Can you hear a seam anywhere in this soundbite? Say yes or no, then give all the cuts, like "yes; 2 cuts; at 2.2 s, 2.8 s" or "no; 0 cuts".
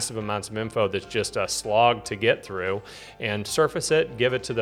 no; 0 cuts